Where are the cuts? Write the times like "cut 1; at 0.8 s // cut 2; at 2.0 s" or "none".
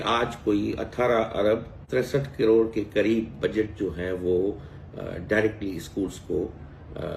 cut 1; at 1.8 s